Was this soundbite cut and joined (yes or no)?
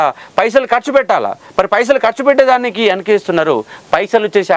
no